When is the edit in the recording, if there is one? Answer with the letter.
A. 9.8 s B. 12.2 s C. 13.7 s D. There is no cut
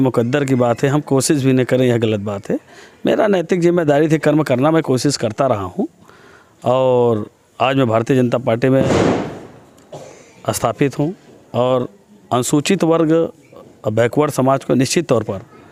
D